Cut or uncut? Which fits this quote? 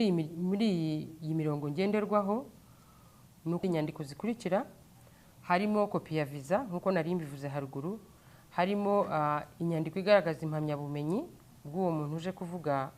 cut